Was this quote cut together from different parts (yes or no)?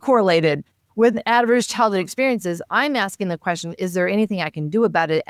no